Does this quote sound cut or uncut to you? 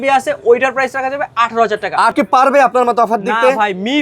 cut